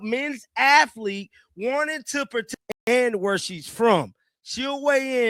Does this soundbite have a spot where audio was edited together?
yes; 1 cut; at 2.6 s

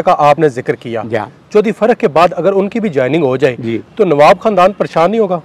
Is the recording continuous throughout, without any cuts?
yes; 0 cuts

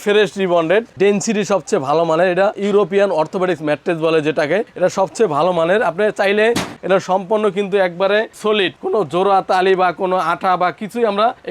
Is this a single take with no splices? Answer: no; 3 cuts; at 0.9 s, 2.6 s, 6.8 s

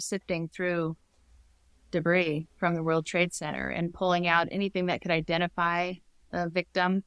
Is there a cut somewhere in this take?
no; 0 cuts

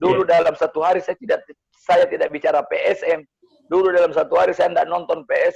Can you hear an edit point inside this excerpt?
no; 0 cuts

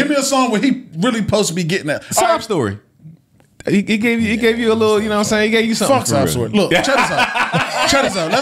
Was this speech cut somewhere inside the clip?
no; 0 cuts

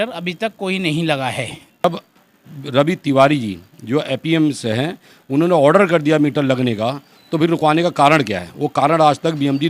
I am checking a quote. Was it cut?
yes; 1 cut; at 1.8 s

